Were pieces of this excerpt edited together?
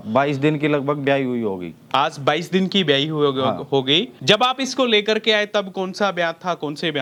no; 0 cuts

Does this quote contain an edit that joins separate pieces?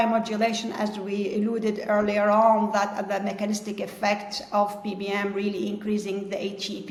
no; 0 cuts

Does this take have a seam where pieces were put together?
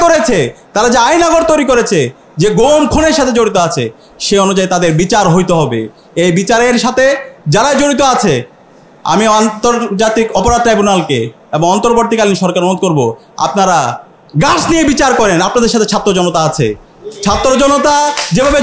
no; 0 cuts

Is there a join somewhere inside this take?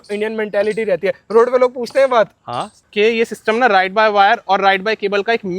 yes; 1 cut; at 2.8 s

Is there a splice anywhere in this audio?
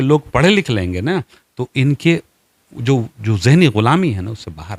no; 0 cuts

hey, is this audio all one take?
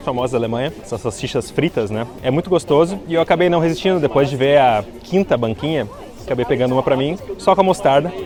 yes; 0 cuts

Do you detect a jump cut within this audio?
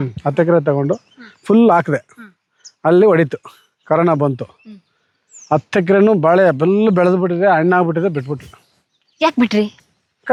no; 0 cuts

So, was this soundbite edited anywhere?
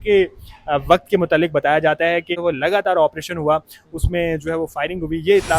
yes; 1 cut; at 2.3 s

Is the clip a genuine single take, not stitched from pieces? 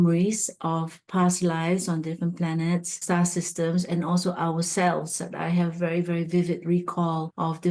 yes; 0 cuts

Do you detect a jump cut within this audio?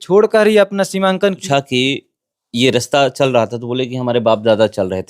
yes; 1 cut; at 1.4 s

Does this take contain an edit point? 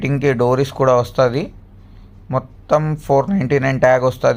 no; 0 cuts

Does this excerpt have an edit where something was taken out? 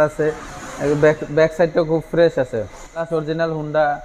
yes; 1 cut; at 3.1 s

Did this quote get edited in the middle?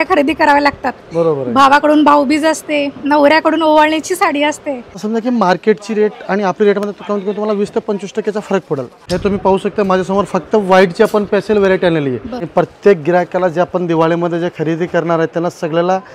yes; 3 cuts; at 5.0 s, 8.9 s, 12.4 s

